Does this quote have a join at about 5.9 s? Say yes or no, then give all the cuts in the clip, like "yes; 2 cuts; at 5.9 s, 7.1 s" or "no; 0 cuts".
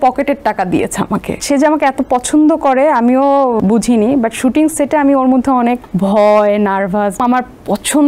yes; 4 cuts; at 1.4 s, 3.6 s, 5.9 s, 7.2 s